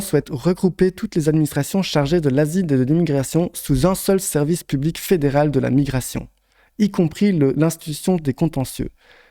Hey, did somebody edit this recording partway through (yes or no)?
no